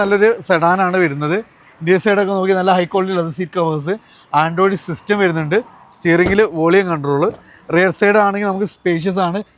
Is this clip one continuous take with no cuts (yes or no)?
yes